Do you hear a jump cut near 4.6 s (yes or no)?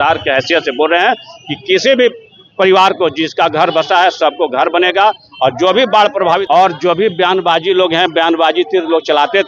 no